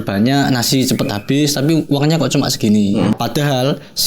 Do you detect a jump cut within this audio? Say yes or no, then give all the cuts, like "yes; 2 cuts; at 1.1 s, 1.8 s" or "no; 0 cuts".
yes; 1 cut; at 3.1 s